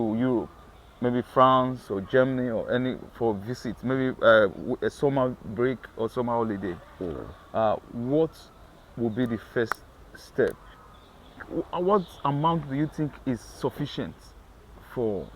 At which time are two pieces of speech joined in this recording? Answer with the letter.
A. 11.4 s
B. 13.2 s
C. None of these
A